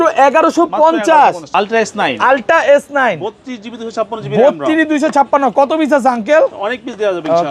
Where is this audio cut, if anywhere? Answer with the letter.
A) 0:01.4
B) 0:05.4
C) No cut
A